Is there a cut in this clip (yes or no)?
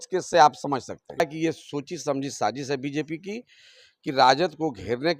yes